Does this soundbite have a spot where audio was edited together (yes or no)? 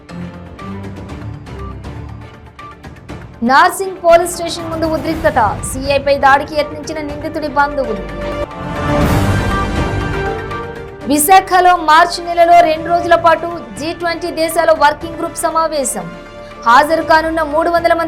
yes